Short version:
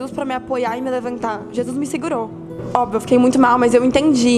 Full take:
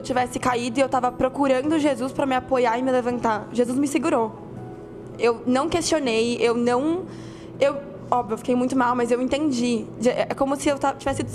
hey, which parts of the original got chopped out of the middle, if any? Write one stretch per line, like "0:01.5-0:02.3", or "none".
0:04.6-0:07.9